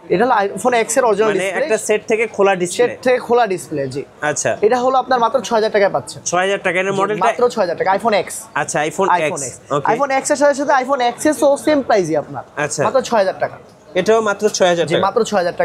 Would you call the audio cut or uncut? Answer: uncut